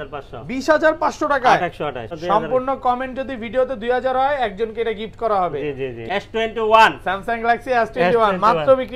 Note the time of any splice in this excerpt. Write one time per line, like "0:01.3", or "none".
0:02.1
0:06.0